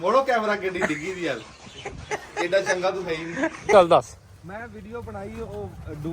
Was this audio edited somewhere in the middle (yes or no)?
yes